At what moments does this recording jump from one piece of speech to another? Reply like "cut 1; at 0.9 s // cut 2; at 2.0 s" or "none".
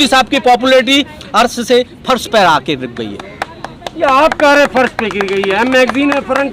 none